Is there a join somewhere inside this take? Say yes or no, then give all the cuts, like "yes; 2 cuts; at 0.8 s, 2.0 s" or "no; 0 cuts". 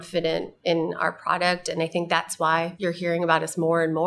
yes; 1 cut; at 2.7 s